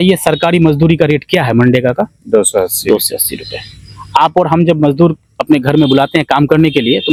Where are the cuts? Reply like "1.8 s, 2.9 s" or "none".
none